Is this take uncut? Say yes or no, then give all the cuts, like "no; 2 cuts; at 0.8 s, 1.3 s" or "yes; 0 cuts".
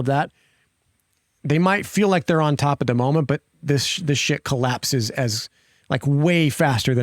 yes; 0 cuts